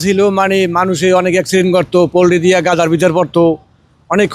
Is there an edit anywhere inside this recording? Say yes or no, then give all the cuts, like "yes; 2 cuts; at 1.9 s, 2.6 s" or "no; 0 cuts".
no; 0 cuts